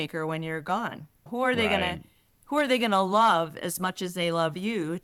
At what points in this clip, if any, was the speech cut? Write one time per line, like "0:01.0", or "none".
none